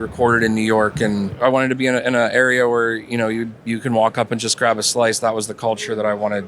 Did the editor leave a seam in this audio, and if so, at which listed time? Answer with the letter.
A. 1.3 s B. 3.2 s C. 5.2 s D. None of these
A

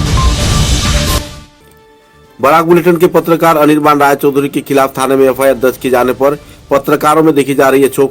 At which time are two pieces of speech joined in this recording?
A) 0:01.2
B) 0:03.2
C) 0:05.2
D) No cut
A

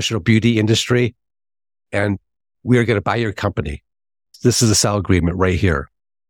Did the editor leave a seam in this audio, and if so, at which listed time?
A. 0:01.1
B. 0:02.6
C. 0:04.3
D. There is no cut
C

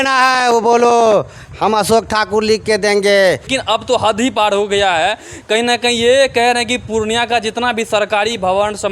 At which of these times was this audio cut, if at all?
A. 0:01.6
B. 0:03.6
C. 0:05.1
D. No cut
B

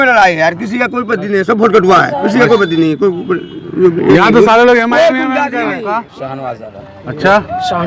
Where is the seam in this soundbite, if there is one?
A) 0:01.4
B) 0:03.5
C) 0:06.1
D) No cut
C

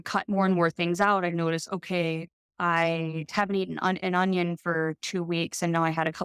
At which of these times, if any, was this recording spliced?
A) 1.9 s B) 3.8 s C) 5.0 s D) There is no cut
D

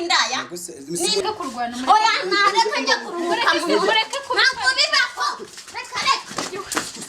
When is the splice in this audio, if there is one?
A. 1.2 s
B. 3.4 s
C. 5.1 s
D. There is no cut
A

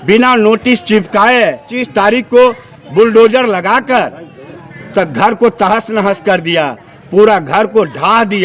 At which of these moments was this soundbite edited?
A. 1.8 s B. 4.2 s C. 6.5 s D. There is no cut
A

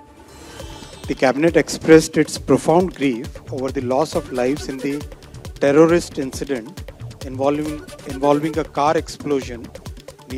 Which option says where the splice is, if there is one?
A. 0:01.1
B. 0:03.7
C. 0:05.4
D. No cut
A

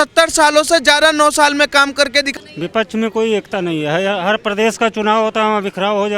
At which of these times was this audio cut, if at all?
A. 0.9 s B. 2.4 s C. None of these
B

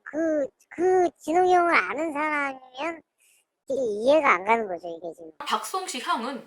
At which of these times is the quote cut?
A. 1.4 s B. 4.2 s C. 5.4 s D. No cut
C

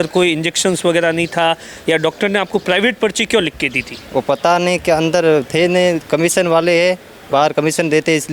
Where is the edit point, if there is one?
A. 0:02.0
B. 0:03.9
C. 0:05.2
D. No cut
D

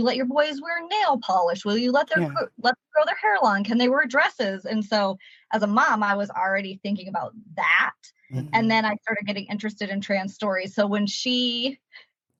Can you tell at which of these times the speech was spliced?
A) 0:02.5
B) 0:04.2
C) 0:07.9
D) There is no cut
D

